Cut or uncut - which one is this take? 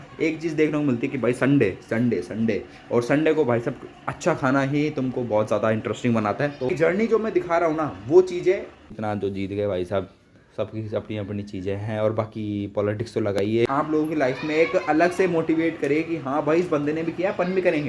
cut